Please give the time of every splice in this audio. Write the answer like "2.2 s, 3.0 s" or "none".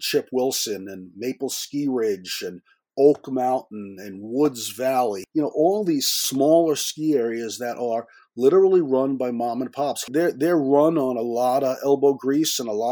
5.2 s, 6.2 s, 10.1 s